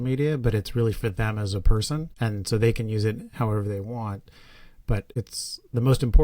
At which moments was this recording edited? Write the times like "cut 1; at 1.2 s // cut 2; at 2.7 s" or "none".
cut 1; at 2.1 s // cut 2; at 5.1 s